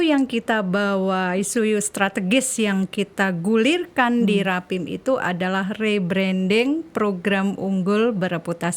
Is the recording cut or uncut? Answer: uncut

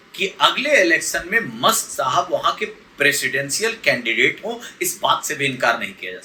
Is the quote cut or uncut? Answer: uncut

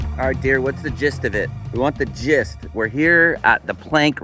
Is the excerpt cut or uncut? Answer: cut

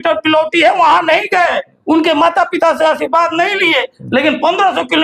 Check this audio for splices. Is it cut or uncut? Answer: uncut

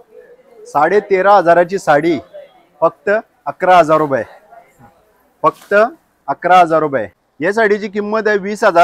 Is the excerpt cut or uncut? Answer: cut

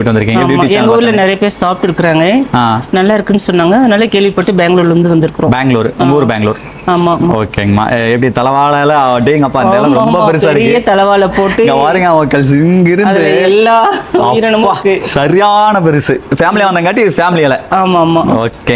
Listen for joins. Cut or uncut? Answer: uncut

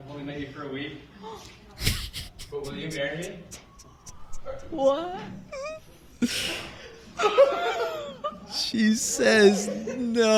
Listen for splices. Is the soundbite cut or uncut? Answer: uncut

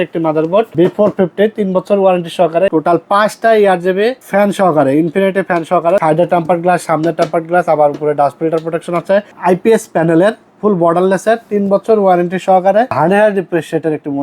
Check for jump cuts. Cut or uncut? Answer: cut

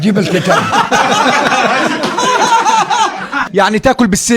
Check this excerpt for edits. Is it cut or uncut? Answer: cut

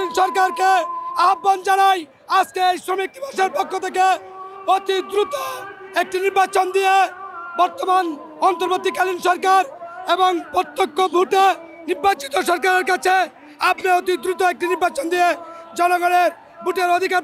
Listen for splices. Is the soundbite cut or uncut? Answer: uncut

